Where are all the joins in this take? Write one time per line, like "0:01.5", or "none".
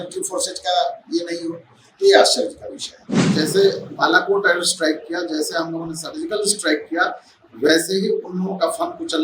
0:03.3